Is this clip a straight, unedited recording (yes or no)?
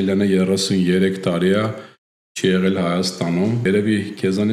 no